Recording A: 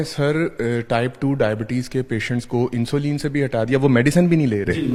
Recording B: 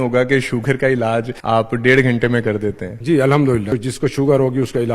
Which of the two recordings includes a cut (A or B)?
B